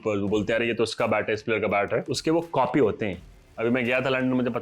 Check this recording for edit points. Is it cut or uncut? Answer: cut